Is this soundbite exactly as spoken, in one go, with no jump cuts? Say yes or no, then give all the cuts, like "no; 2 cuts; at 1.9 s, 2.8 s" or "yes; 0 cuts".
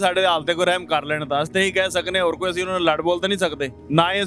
yes; 0 cuts